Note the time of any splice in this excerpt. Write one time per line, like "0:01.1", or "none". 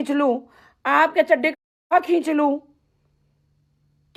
none